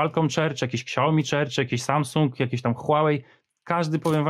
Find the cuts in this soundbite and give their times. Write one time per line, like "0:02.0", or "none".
none